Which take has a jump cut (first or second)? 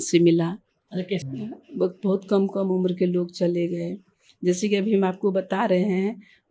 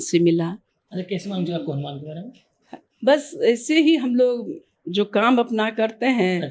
first